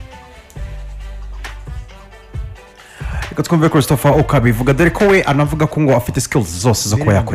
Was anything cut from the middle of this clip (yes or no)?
yes